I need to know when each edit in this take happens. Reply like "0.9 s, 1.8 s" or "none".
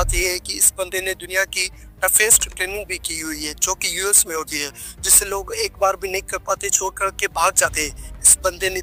none